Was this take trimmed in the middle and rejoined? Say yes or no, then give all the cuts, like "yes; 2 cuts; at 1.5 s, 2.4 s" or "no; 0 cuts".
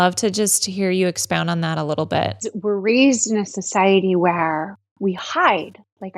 yes; 1 cut; at 2.5 s